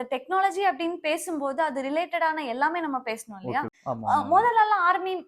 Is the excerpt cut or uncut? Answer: cut